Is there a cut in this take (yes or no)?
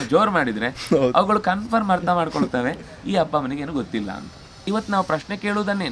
yes